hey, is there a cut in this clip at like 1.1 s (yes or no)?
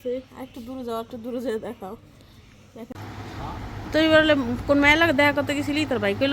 no